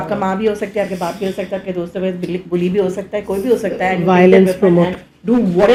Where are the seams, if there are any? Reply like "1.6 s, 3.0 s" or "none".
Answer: none